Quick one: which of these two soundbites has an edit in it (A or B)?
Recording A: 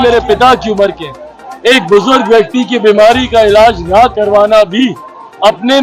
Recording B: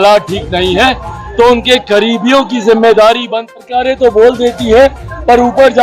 B